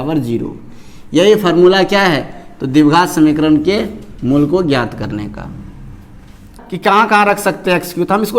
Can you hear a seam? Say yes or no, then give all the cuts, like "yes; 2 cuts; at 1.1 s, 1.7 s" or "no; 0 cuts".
yes; 1 cut; at 6.6 s